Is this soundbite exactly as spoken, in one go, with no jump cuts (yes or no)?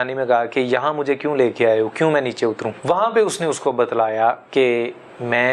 no